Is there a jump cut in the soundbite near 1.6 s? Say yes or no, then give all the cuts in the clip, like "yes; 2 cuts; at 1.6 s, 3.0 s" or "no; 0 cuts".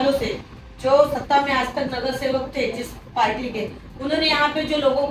no; 0 cuts